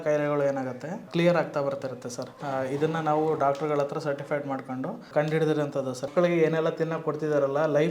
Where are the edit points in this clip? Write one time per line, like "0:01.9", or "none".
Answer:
0:02.3
0:05.1
0:06.1